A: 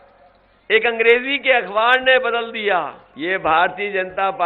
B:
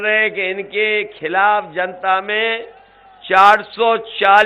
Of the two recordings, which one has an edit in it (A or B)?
A